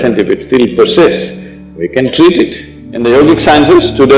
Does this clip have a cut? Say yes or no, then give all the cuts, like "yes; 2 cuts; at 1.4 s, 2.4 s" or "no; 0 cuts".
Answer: yes; 1 cut; at 2.9 s